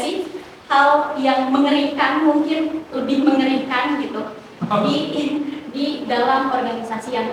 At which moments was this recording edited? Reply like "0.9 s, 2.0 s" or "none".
none